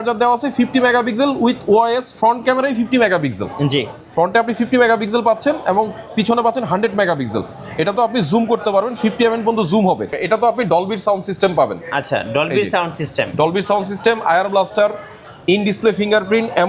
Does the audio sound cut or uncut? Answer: cut